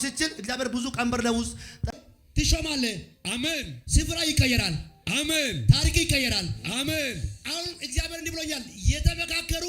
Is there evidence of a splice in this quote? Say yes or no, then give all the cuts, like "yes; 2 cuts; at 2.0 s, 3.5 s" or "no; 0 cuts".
yes; 1 cut; at 1.8 s